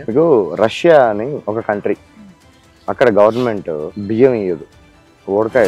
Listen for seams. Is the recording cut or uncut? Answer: cut